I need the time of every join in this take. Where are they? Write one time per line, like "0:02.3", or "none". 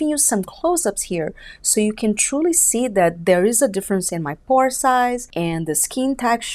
0:05.3